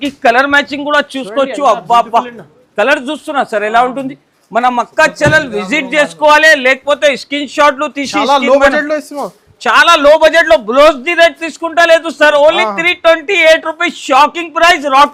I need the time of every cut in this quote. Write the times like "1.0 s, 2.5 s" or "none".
none